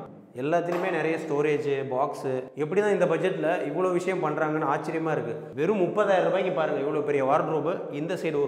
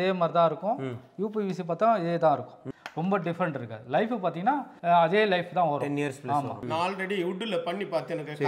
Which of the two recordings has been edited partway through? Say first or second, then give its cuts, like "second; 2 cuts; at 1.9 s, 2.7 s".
second; 2 cuts; at 2.6 s, 6.6 s